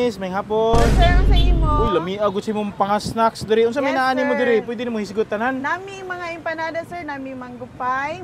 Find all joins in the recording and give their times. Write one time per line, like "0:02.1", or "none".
none